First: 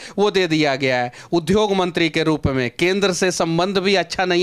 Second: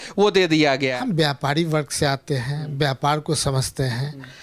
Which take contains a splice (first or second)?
second